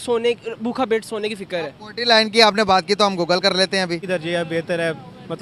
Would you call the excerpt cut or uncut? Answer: cut